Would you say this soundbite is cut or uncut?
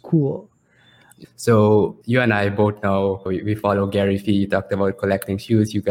cut